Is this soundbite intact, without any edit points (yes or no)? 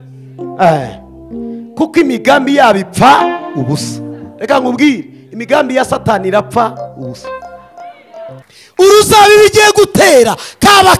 no